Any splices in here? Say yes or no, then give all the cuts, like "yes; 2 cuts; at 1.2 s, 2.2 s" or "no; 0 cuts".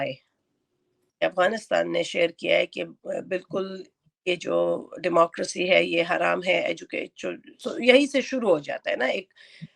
yes; 1 cut; at 1.1 s